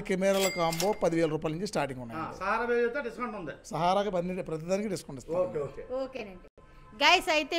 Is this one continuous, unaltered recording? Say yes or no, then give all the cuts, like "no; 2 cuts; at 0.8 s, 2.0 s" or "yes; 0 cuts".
yes; 0 cuts